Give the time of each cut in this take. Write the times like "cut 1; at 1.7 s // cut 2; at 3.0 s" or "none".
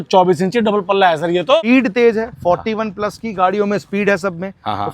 cut 1; at 1.6 s